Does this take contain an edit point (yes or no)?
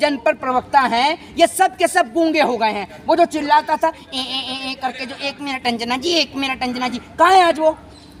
no